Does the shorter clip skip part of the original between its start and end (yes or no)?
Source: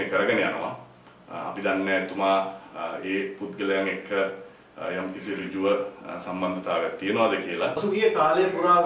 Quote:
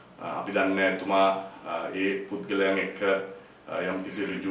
no